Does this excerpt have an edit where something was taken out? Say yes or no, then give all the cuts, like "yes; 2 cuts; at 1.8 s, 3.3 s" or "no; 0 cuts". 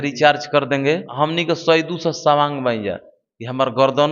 yes; 1 cut; at 1.1 s